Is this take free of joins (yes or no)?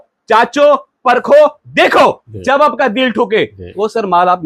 yes